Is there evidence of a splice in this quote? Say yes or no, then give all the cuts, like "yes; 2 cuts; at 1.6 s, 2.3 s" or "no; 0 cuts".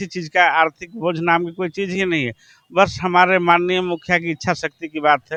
no; 0 cuts